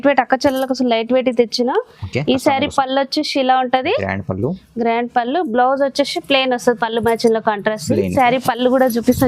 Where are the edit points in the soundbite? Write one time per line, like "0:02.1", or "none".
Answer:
0:08.1